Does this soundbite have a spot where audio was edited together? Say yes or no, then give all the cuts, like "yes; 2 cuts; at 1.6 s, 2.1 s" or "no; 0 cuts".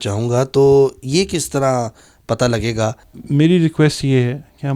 yes; 1 cut; at 3.0 s